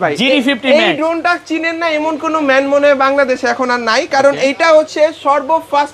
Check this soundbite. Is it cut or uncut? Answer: uncut